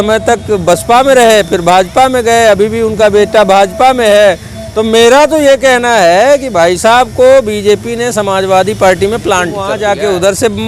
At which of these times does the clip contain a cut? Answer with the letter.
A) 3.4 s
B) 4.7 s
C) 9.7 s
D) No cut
C